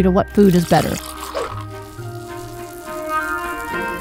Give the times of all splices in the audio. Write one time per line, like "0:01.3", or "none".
0:01.1